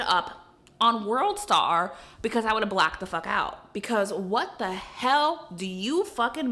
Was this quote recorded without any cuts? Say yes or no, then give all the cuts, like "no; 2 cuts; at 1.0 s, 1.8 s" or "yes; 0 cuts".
yes; 0 cuts